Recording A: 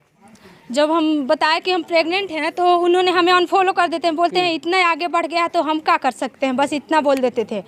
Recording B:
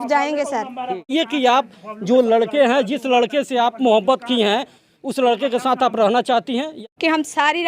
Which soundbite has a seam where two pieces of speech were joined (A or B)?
B